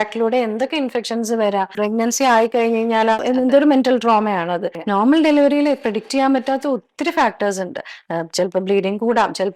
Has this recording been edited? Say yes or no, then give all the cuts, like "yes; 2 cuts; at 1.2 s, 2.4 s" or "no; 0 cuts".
yes; 3 cuts; at 1.8 s, 3.2 s, 4.7 s